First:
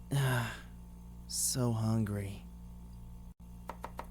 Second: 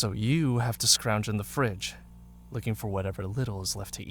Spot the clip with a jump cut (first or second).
first